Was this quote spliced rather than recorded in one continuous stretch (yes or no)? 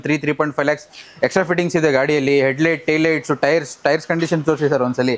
no